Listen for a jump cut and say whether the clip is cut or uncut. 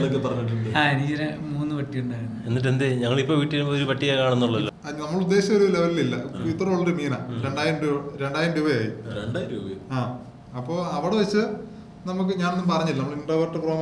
cut